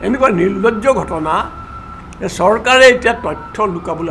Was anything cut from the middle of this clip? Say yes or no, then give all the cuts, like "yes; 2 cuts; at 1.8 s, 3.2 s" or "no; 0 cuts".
no; 0 cuts